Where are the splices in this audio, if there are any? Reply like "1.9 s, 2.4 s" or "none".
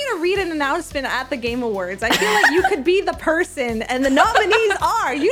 none